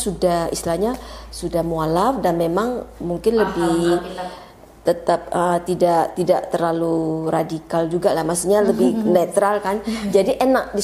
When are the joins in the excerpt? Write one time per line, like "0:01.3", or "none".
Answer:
none